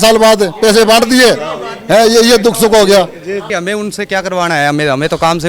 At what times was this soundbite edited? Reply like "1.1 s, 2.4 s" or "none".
3.5 s